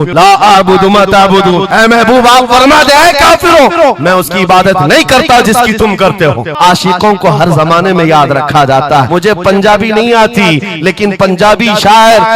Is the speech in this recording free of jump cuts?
no; 2 cuts; at 6.5 s, 9.1 s

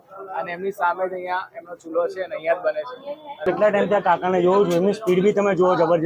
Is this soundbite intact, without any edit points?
yes; 0 cuts

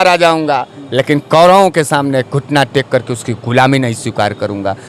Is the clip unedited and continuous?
yes; 0 cuts

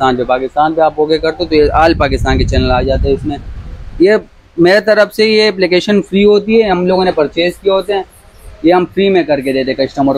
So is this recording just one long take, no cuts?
yes; 0 cuts

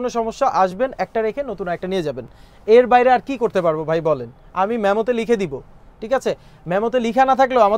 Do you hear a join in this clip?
no; 0 cuts

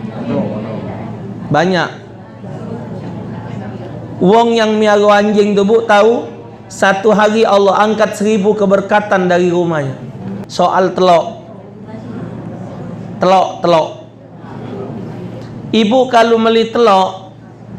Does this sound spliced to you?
yes; 1 cut; at 10.4 s

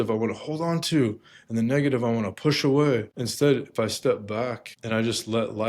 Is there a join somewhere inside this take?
yes; 2 cuts; at 3.2 s, 4.7 s

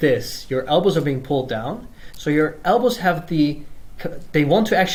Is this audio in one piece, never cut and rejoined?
yes; 0 cuts

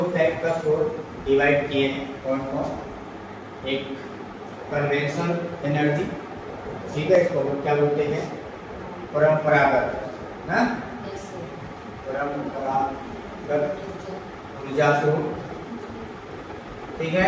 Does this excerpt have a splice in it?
no; 0 cuts

